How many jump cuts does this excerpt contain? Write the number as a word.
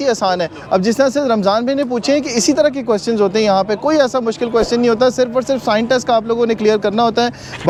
zero